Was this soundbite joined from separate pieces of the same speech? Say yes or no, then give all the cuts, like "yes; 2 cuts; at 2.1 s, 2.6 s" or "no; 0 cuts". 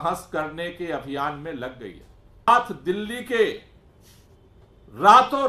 yes; 1 cut; at 2.5 s